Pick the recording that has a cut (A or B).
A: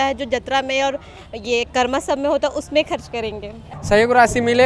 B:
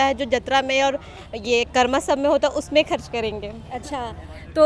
A